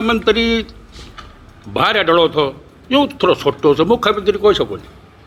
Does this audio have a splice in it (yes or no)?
no